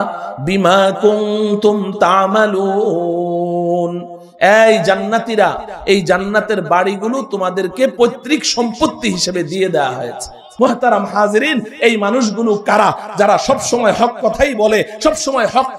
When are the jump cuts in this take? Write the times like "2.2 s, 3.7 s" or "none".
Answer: 10.5 s